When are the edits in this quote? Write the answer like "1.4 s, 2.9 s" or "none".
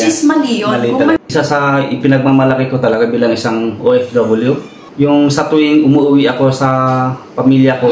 1.2 s